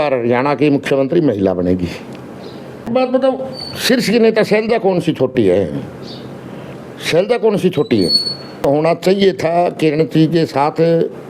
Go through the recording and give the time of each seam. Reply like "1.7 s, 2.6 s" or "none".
2.9 s, 8.6 s